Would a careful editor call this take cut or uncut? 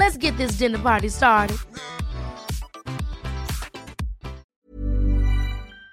cut